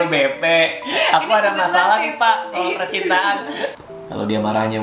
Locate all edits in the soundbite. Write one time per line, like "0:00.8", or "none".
0:03.8